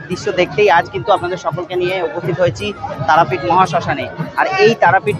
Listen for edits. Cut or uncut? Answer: uncut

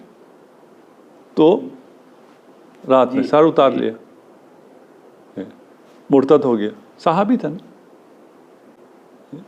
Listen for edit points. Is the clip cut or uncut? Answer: uncut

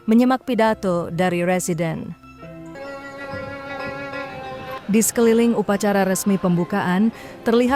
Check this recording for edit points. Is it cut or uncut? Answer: cut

